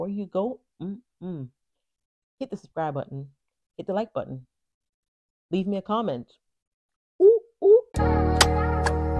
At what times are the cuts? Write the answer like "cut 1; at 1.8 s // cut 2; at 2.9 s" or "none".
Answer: cut 1; at 7.9 s